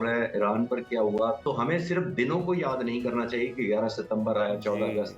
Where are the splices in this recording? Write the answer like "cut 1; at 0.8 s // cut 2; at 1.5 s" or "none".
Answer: cut 1; at 1.4 s